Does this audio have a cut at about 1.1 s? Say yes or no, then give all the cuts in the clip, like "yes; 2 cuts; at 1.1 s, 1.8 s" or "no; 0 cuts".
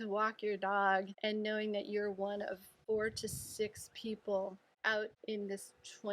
yes; 3 cuts; at 1.1 s, 2.7 s, 5.1 s